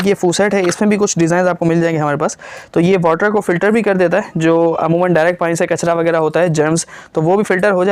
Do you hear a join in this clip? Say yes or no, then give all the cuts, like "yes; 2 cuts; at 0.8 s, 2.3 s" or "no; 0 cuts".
no; 0 cuts